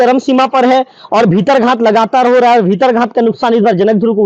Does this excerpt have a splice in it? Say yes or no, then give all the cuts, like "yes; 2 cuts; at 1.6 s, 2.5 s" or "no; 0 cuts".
no; 0 cuts